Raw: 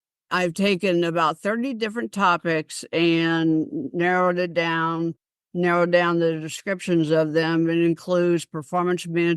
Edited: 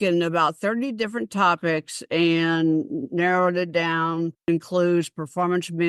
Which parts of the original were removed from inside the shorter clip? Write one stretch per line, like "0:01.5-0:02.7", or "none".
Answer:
0:05.3-0:07.8